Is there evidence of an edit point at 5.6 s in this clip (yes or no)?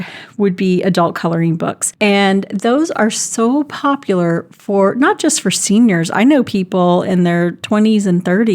no